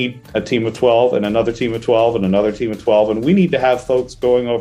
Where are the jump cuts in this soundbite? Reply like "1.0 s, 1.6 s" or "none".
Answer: none